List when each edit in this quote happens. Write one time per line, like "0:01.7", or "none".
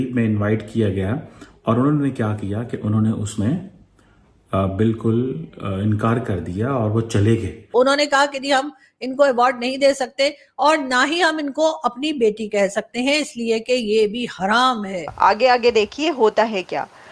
0:07.6
0:15.0